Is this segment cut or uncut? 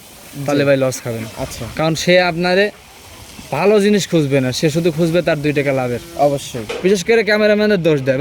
cut